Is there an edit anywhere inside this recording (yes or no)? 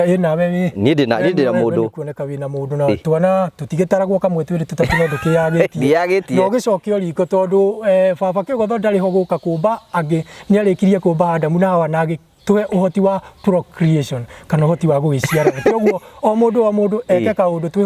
no